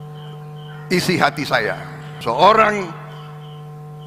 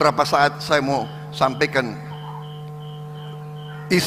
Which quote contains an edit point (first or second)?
first